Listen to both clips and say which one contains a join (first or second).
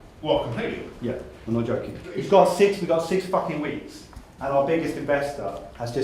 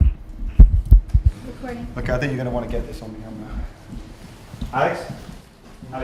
first